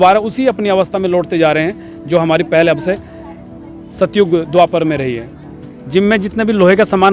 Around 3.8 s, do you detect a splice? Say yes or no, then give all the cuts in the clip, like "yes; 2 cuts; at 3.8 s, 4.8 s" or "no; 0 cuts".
no; 1 cut; at 5.7 s